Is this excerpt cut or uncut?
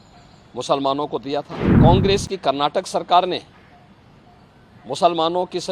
cut